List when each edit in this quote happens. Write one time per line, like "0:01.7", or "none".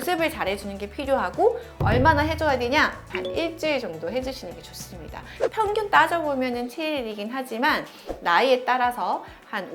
none